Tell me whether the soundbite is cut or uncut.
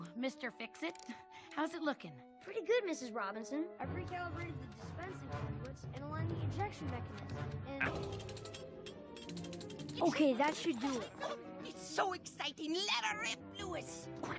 uncut